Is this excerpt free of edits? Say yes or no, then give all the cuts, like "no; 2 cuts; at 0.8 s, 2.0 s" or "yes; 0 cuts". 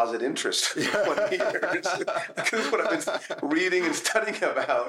yes; 0 cuts